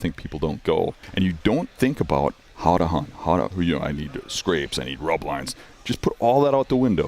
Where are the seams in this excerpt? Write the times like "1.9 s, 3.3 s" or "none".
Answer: 1.0 s, 2.5 s